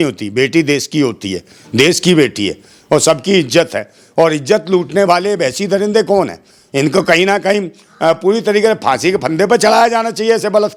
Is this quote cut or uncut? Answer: uncut